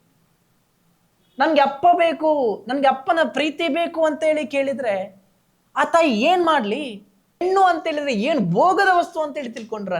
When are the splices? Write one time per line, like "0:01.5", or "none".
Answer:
0:07.4